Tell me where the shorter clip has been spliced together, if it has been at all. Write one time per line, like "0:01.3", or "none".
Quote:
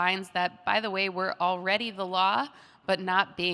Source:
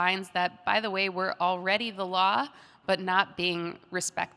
none